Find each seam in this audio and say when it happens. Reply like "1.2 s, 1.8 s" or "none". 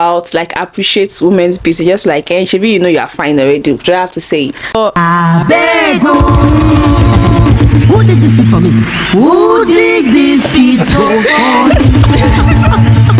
5.0 s